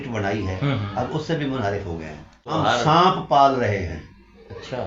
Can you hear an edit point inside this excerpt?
yes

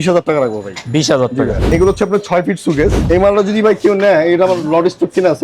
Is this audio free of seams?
no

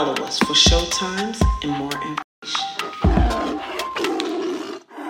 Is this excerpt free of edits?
no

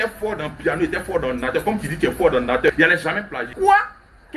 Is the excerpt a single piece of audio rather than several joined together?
no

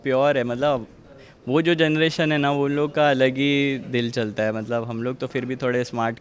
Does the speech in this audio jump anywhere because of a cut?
no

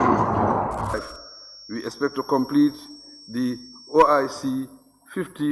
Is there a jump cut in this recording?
yes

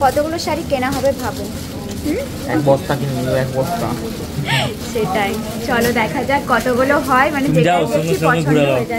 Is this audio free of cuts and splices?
yes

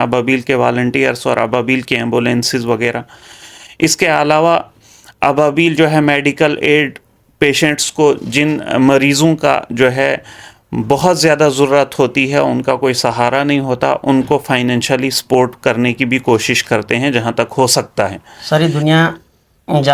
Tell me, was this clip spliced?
yes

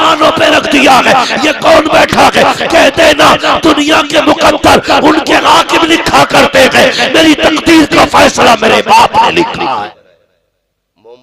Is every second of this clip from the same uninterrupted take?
no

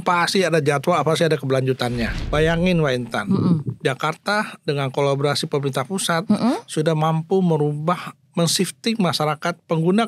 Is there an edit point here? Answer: yes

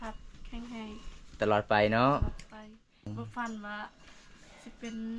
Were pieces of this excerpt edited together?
yes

